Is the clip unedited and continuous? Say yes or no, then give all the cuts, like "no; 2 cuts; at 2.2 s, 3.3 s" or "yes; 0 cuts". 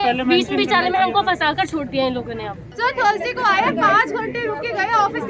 no; 1 cut; at 2.7 s